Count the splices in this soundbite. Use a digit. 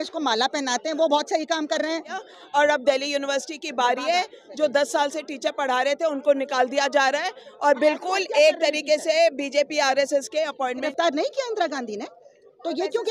2